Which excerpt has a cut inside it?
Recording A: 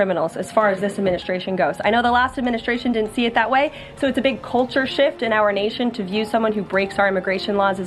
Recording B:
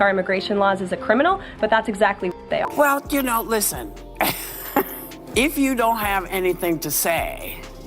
B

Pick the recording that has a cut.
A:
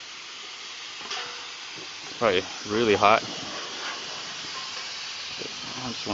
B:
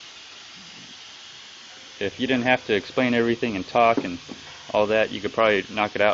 A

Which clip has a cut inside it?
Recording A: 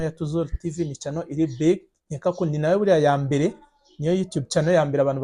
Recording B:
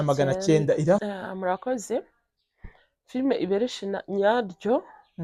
B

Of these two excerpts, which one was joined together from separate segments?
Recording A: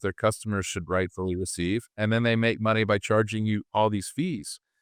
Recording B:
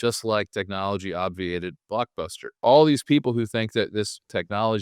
B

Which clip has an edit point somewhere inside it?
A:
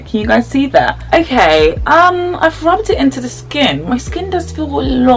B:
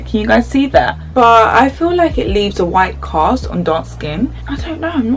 B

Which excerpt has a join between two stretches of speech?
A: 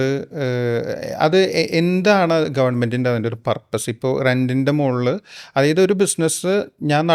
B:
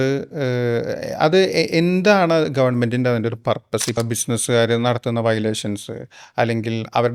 B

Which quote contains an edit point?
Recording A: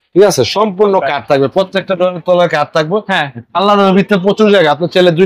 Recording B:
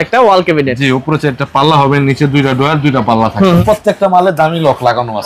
B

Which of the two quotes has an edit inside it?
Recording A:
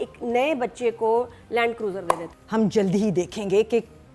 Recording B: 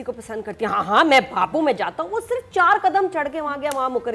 A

